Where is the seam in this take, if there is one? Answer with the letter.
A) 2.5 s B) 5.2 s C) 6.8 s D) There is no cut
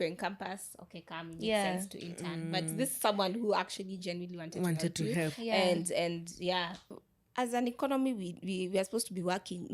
C